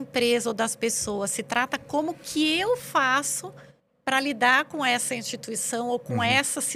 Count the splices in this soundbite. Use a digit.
0